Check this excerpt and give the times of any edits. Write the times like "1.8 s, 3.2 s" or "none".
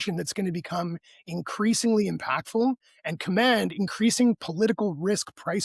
none